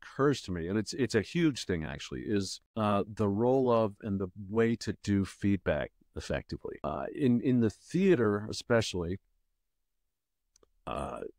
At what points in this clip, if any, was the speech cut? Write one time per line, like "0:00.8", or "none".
0:02.6
0:06.7